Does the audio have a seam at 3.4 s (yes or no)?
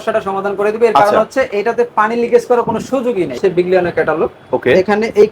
yes